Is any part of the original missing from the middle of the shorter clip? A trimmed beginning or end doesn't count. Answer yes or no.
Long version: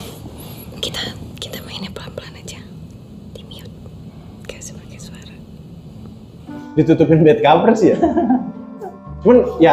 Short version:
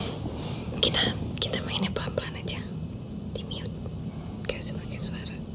no